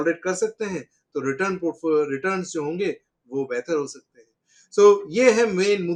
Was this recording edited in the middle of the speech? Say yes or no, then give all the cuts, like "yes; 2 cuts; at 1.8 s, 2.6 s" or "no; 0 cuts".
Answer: no; 0 cuts